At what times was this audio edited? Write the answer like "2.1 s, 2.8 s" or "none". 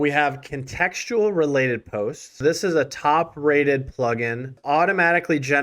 2.3 s, 4.6 s